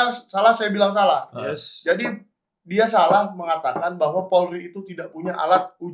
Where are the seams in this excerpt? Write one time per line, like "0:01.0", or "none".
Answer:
none